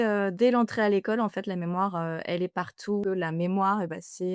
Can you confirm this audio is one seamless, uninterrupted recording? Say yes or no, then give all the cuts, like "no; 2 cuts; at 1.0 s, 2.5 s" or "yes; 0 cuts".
no; 1 cut; at 3.0 s